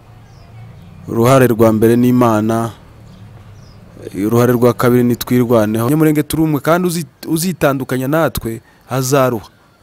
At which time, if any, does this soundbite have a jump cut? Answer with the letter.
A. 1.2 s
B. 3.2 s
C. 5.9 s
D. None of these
C